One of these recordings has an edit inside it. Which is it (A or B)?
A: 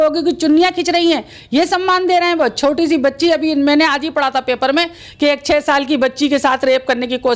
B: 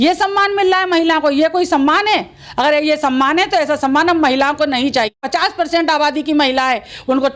B